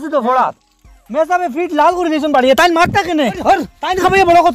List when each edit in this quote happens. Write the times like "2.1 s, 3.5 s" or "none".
3.4 s

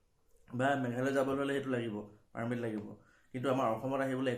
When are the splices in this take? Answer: none

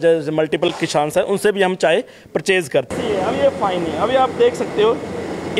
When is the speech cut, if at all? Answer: 2.9 s

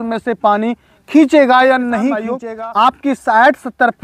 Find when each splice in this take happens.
2.4 s

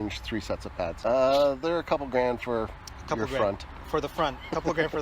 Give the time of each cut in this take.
1.0 s

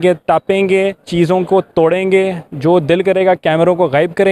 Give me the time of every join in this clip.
1.0 s, 2.4 s

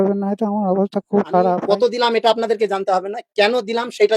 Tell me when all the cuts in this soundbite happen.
1.6 s

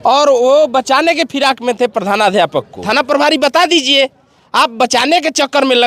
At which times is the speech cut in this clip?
2.8 s

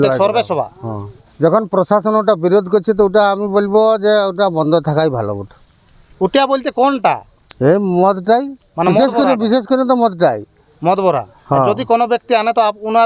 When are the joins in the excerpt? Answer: 1.2 s

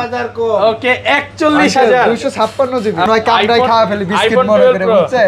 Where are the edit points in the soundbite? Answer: 3.1 s

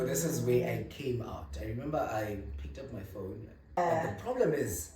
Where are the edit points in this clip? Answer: 3.8 s

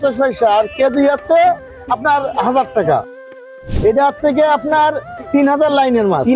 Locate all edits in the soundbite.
3.5 s

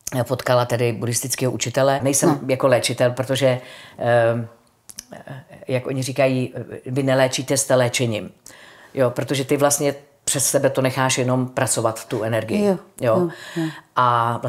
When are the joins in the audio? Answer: 2.0 s

